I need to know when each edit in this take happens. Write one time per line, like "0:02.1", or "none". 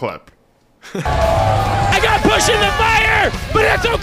0:01.0